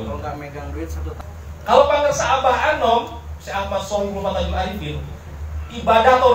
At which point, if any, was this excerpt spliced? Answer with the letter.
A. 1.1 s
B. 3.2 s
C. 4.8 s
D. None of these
A